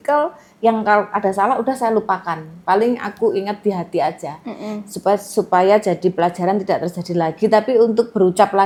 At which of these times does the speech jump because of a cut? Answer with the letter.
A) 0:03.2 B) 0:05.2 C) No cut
C